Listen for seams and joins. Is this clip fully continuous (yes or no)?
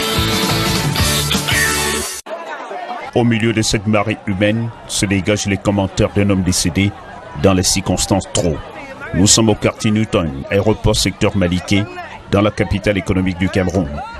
no